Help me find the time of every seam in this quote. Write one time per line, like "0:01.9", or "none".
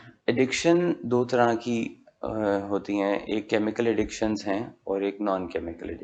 none

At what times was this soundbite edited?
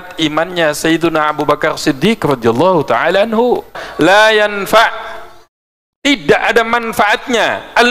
0:03.8

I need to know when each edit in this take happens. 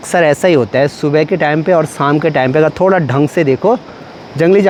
none

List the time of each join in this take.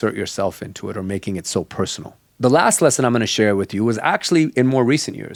none

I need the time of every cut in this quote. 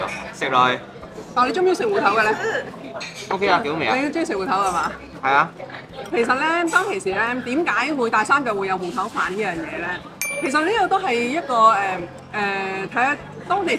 none

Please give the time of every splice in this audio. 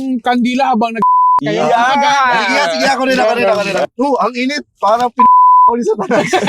0:03.8

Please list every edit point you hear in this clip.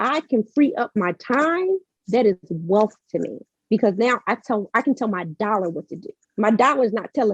none

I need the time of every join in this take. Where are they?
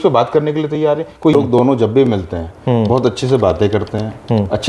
0:01.3

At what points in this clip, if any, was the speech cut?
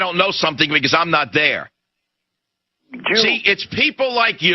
0:02.6

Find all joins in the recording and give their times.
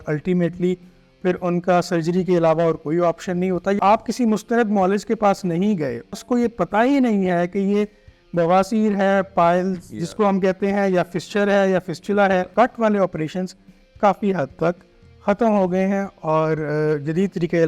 0:03.8
0:06.1
0:12.5

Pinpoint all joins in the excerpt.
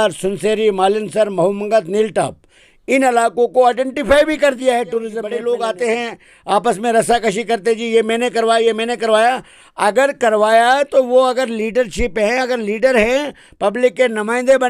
0:05.2

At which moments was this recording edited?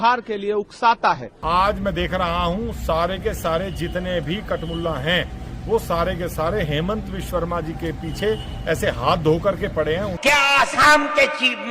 0:01.3
0:10.1

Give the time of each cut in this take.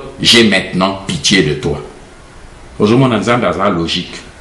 none

